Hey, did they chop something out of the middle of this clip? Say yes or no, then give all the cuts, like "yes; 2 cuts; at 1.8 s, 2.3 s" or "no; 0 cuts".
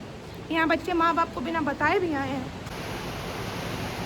yes; 1 cut; at 2.7 s